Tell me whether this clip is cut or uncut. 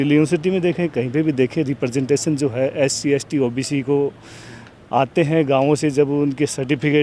uncut